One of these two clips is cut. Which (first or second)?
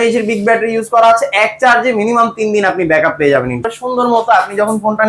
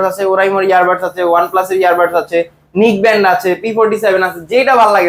first